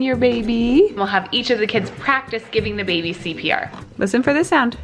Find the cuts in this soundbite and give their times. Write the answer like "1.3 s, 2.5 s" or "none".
1.0 s, 3.8 s